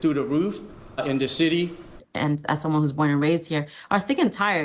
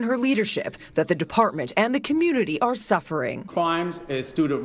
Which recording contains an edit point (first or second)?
first